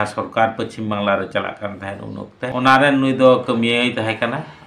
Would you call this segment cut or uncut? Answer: uncut